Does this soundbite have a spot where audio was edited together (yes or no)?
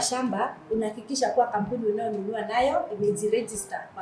no